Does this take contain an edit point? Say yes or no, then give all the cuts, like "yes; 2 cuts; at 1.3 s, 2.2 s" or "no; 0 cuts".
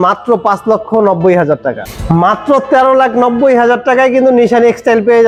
no; 0 cuts